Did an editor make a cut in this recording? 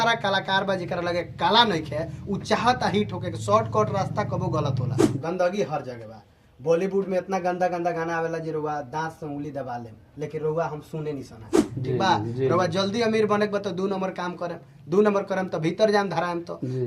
yes; 2 cuts; at 5.2 s, 11.7 s

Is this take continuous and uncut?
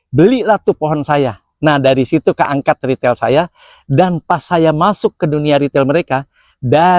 yes; 0 cuts

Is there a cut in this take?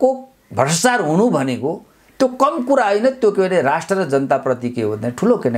no; 0 cuts

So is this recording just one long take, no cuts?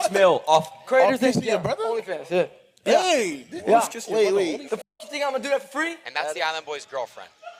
no; 1 cut; at 6.0 s

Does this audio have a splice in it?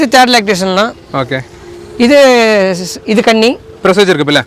no; 0 cuts

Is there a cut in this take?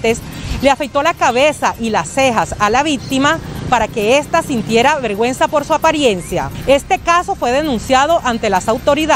yes; 1 cut; at 6.5 s

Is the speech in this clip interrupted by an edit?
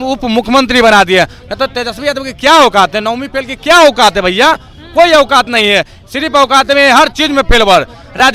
no; 0 cuts

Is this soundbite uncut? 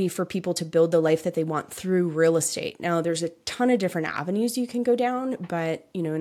yes; 0 cuts

